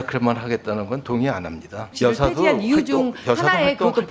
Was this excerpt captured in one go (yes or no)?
no